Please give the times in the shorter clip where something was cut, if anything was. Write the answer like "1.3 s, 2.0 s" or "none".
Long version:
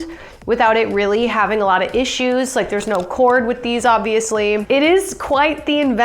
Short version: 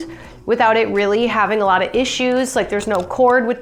none